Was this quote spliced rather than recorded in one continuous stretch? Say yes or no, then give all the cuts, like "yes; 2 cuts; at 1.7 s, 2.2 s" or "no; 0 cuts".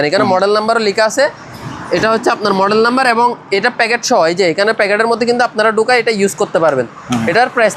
no; 0 cuts